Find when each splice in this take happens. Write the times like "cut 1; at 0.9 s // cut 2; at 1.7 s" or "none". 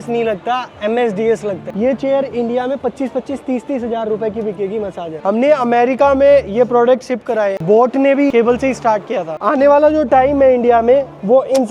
cut 1; at 1.7 s // cut 2; at 5.1 s // cut 3; at 7.6 s // cut 4; at 9.4 s